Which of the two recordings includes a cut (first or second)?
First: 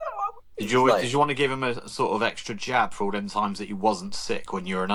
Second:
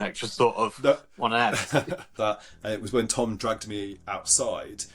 second